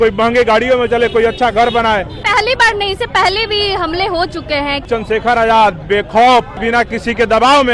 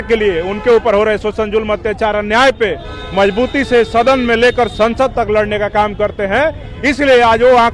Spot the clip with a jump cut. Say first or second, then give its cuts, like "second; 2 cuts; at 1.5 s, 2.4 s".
first; 3 cuts; at 2.1 s, 4.8 s, 6.6 s